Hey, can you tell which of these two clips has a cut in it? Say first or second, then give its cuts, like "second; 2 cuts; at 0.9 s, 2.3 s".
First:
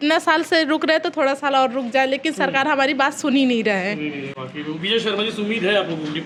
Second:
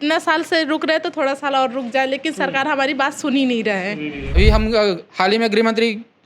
second; 1 cut; at 4.2 s